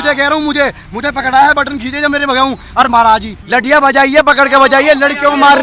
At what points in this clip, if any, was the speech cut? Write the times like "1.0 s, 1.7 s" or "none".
3.4 s

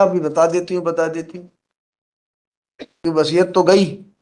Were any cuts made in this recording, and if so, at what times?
3.0 s

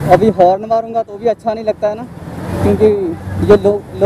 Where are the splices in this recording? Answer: none

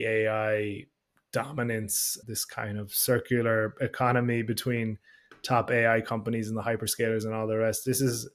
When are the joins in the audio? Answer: 2.1 s

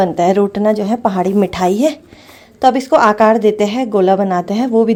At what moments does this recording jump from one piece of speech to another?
none

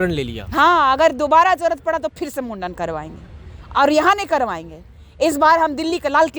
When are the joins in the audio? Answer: none

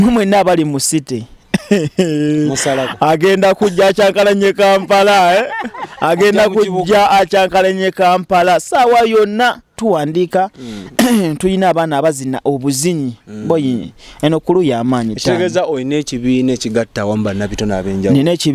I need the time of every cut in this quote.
9.8 s

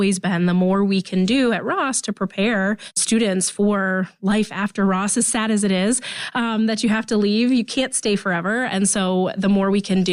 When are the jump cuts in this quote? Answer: none

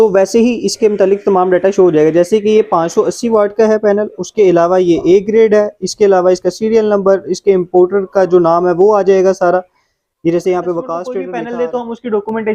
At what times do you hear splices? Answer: 11.2 s

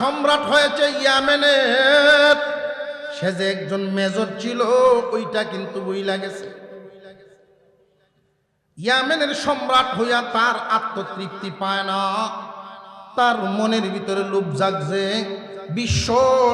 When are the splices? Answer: 3.1 s

